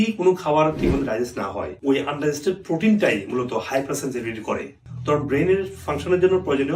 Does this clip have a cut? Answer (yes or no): yes